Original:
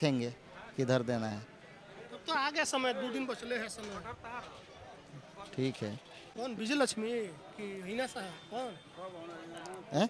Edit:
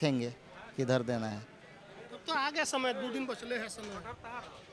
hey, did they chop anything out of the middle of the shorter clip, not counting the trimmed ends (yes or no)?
no